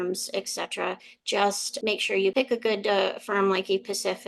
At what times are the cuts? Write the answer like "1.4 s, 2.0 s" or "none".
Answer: 1.9 s